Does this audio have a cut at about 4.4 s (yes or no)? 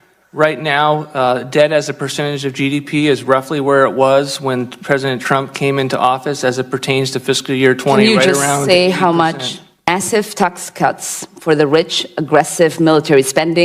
no